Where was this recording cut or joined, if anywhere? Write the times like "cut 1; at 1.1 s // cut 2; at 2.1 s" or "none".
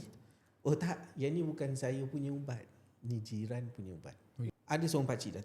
cut 1; at 4.5 s